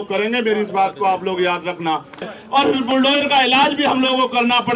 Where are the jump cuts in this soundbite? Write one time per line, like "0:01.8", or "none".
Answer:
0:02.3

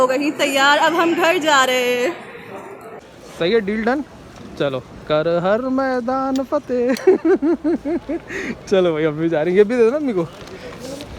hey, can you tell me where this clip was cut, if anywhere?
0:03.2

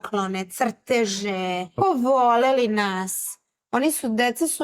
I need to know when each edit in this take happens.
0:01.8

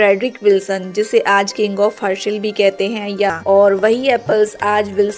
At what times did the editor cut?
0:03.3

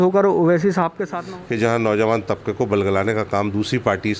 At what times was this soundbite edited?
0:01.1

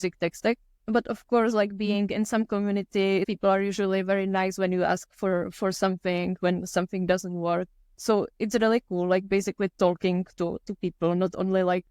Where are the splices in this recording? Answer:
0:03.3
0:07.8

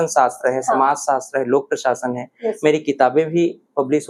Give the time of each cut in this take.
none

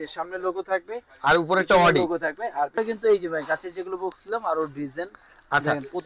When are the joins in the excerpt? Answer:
0:02.8

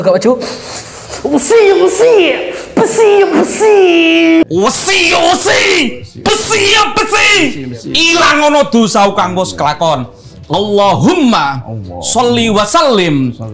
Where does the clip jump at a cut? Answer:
0:04.5

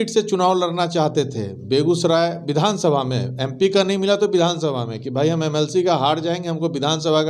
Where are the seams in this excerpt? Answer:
none

